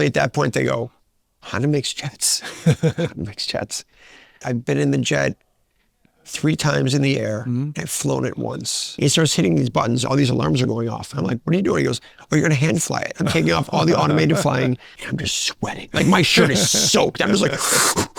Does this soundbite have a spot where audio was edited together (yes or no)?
yes